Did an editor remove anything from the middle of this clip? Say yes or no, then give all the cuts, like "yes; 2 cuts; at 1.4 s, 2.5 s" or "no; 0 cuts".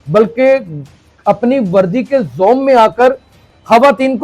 no; 0 cuts